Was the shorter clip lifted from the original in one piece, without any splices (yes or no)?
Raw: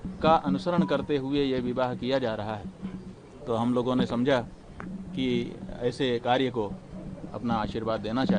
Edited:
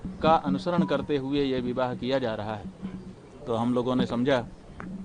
yes